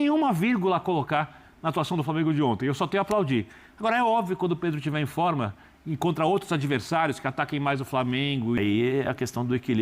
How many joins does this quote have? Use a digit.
1